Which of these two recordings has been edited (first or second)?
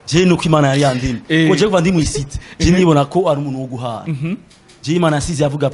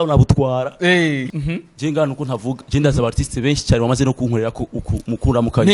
second